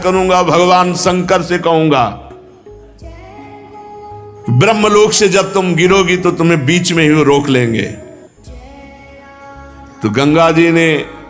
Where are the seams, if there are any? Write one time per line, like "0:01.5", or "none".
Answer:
0:08.5
0:10.0